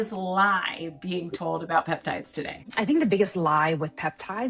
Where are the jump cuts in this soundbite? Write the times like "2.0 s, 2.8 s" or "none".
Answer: 2.6 s